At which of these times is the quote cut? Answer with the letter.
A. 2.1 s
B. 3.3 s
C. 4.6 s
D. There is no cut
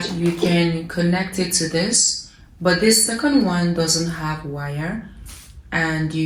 D